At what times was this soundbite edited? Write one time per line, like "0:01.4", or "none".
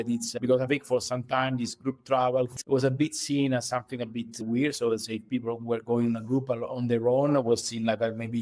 0:02.5